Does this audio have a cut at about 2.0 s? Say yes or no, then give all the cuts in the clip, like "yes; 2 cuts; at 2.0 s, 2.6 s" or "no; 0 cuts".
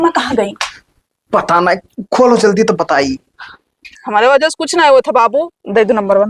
no; 1 cut; at 4.0 s